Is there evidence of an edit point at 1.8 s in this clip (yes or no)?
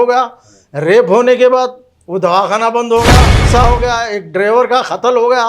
no